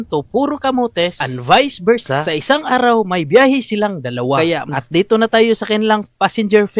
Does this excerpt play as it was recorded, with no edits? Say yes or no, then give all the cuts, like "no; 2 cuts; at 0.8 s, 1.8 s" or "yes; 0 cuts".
no; 1 cut; at 4.7 s